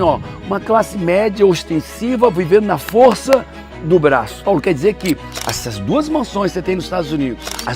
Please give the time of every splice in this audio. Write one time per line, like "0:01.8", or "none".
0:04.4

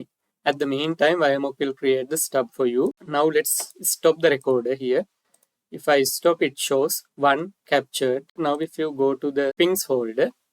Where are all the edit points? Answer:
0:03.0
0:08.4
0:09.5

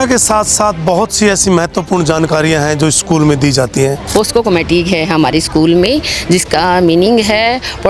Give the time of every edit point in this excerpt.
0:04.1

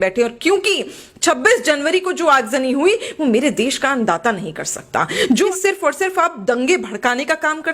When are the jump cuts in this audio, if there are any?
0:05.5

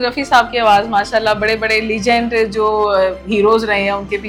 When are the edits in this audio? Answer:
none

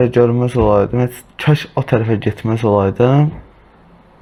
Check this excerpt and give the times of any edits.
none

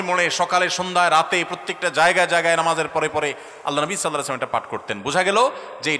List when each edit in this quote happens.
none

